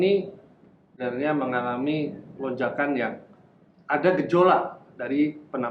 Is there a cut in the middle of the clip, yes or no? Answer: yes